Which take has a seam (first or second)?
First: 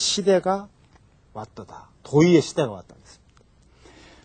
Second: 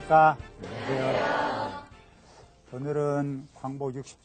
first